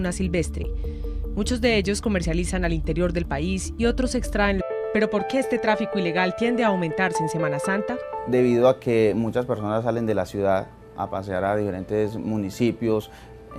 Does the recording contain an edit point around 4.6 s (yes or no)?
no